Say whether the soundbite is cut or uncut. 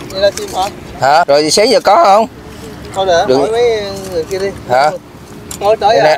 cut